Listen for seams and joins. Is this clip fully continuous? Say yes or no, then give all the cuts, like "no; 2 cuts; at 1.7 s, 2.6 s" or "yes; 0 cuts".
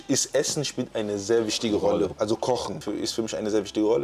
no; 2 cuts; at 2.1 s, 2.8 s